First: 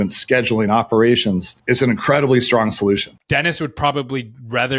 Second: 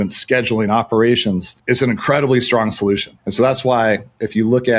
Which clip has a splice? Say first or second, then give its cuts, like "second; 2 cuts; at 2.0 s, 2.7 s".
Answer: first; 1 cut; at 3.1 s